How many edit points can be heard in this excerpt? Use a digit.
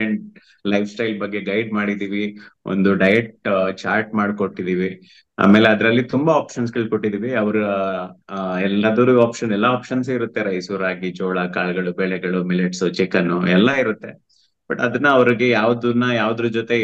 0